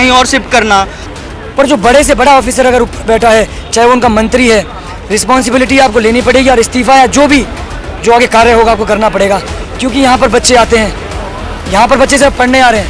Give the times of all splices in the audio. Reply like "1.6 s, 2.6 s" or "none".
1.0 s